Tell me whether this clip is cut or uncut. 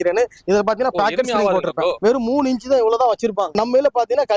cut